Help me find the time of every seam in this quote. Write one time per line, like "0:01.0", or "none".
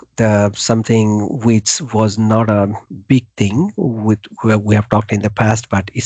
none